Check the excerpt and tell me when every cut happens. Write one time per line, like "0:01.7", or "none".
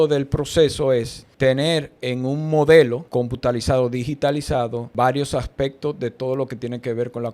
0:01.2
0:03.0
0:04.8